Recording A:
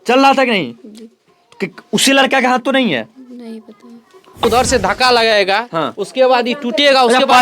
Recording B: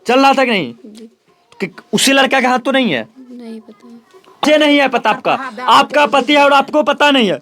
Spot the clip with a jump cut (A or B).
A